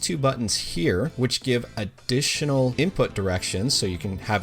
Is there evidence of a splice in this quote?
yes; 2 cuts; at 1.1 s, 2.7 s

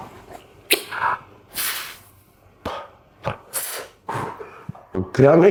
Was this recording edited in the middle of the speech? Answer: no; 0 cuts

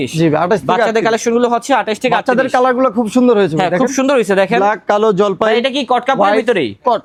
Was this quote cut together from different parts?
no; 0 cuts

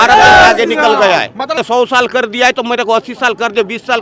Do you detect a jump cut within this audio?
yes; 1 cut; at 1.6 s

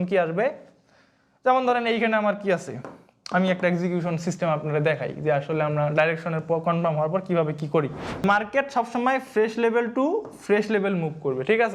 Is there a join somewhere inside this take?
yes; 1 cut; at 8.2 s

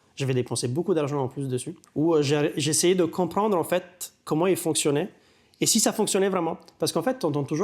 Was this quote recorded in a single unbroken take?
no; 1 cut; at 1.8 s

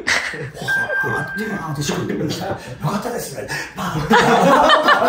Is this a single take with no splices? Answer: yes; 0 cuts

